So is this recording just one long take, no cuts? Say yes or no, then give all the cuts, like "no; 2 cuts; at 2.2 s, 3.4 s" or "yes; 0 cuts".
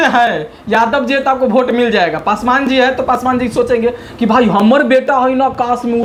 yes; 0 cuts